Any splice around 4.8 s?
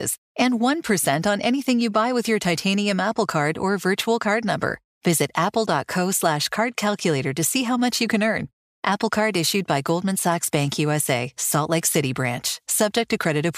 no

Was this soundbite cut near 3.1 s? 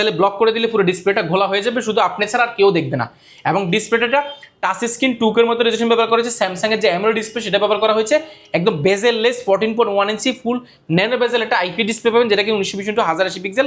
no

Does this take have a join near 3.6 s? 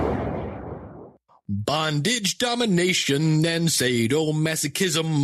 no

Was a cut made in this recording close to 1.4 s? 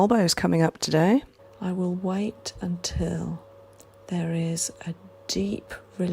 yes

